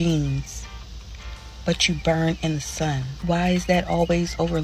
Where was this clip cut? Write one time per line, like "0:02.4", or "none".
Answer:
0:03.1